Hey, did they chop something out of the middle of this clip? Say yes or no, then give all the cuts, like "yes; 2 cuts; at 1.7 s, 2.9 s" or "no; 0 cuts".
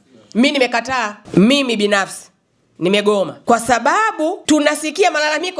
yes; 3 cuts; at 1.2 s, 3.4 s, 4.4 s